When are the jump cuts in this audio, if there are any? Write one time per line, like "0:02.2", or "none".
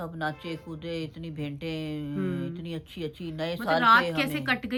none